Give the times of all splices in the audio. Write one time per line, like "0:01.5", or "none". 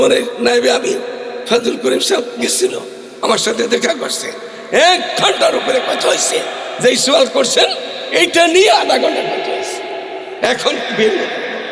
none